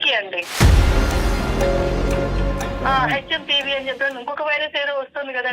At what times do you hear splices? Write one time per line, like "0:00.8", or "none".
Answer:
0:02.8

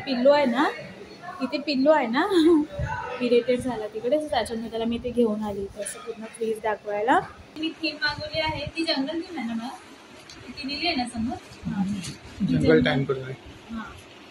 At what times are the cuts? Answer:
0:07.5

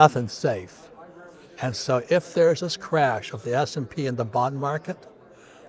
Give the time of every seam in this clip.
none

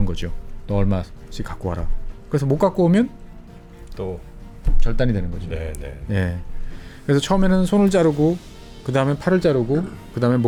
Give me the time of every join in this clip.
none

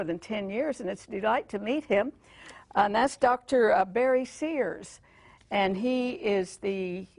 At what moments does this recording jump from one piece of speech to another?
none

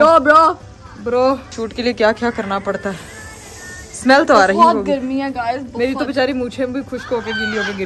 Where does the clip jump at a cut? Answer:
none

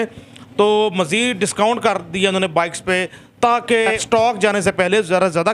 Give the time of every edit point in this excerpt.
0:04.0

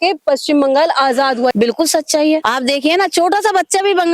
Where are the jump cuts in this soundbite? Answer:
0:01.5
0:02.4

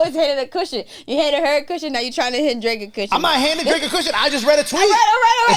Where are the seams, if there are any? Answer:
none

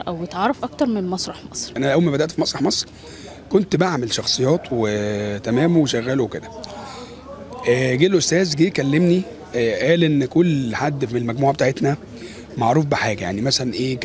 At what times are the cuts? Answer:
0:01.6

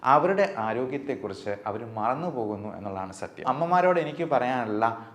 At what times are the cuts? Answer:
0:03.4

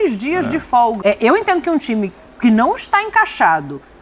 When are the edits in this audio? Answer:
0:01.0

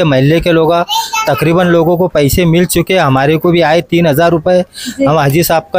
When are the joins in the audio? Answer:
none

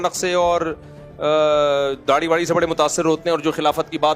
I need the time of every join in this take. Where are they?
none

